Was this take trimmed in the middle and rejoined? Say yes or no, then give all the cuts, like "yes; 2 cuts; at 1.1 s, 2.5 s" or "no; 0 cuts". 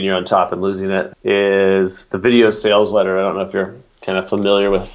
yes; 1 cut; at 1.1 s